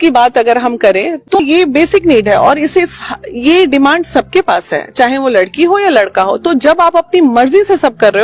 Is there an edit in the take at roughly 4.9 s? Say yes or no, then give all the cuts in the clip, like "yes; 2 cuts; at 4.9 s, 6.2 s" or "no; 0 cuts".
no; 1 cut; at 1.4 s